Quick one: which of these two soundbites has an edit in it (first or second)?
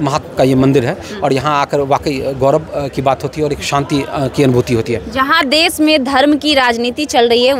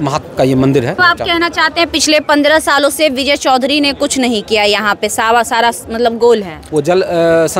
second